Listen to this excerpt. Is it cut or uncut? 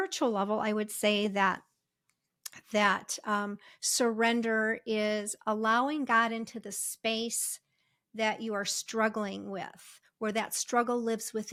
uncut